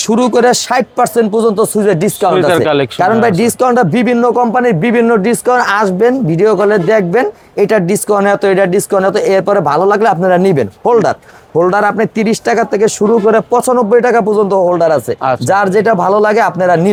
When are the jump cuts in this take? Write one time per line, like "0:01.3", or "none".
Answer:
none